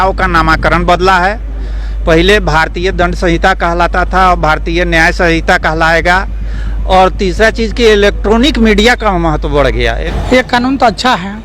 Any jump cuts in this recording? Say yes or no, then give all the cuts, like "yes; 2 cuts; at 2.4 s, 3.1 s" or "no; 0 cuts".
yes; 1 cut; at 10.0 s